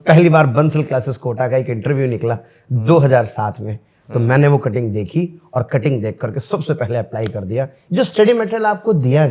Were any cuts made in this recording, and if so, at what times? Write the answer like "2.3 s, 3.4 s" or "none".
7.8 s